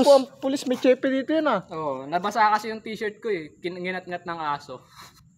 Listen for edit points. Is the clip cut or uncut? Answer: uncut